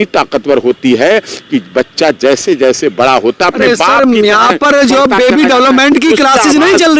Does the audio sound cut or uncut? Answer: uncut